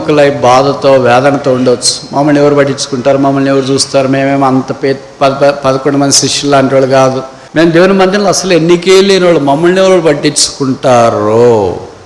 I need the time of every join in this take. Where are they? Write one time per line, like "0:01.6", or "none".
0:07.3